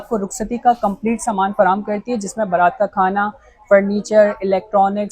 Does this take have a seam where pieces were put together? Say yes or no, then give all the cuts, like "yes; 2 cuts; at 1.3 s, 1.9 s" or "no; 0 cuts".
no; 0 cuts